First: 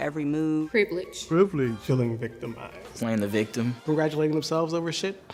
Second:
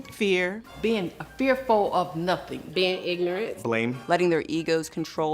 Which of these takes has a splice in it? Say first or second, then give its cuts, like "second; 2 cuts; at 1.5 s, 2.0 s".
second; 1 cut; at 2.6 s